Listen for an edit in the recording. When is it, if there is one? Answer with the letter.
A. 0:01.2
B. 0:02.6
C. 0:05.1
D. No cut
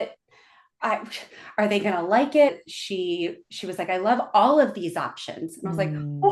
B